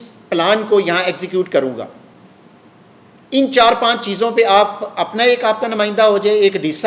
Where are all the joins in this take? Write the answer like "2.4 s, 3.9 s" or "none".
none